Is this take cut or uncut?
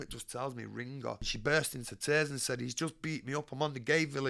cut